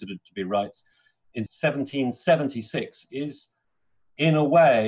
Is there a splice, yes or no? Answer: no